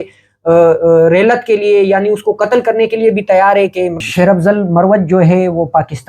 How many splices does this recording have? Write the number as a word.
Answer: one